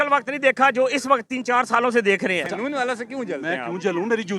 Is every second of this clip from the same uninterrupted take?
no; 1 cut; at 2.5 s

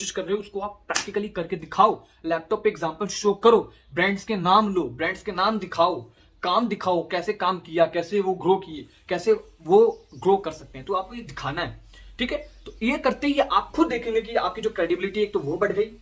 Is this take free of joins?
yes; 0 cuts

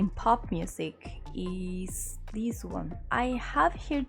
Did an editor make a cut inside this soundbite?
yes; 1 cut; at 3.0 s

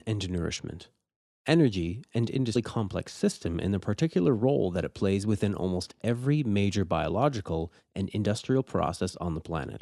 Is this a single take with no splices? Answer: yes; 0 cuts

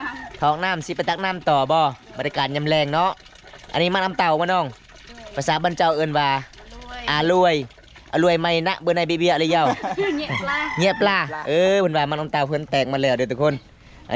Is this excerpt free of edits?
yes; 0 cuts

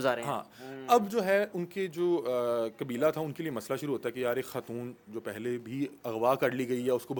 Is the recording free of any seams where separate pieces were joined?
yes; 0 cuts

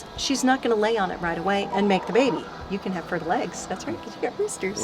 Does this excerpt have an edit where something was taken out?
yes; 1 cut; at 2.5 s

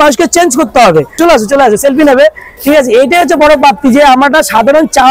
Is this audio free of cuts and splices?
no; 1 cut; at 1.2 s

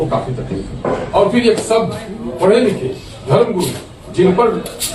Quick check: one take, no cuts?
no; 1 cut; at 1.2 s

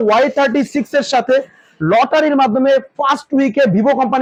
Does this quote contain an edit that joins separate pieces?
no; 0 cuts

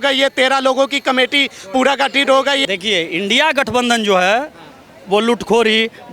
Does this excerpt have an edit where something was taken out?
yes; 1 cut; at 2.6 s

